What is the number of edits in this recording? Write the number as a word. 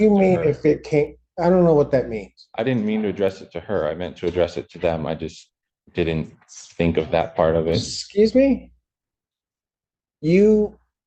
zero